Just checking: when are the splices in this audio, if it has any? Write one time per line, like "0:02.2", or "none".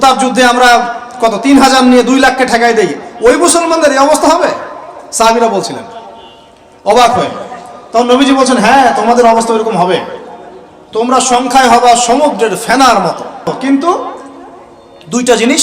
0:13.5

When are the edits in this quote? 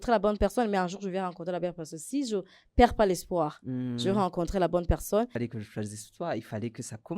0:05.3

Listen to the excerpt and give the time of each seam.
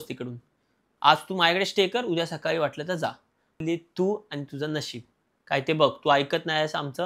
0:03.6

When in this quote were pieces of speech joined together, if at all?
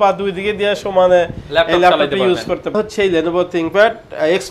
0:02.7

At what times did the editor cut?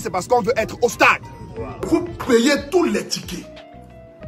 0:01.9

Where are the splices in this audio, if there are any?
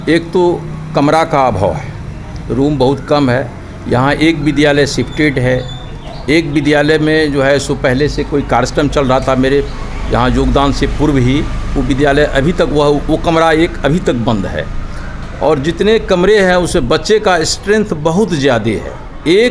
none

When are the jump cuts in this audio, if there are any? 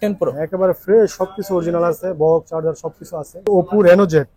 0:03.5

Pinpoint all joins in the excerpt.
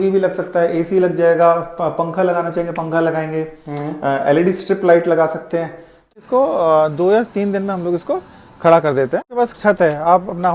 0:06.1
0:09.3

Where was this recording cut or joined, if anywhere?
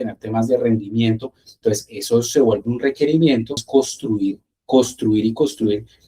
0:03.6

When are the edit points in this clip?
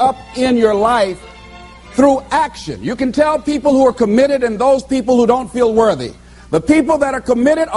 none

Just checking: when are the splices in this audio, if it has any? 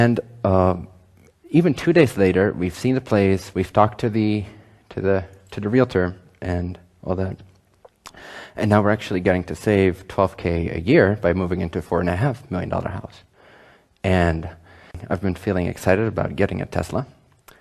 0:14.4

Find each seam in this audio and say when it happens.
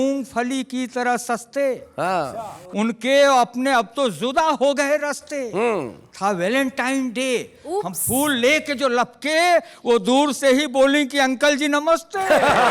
none

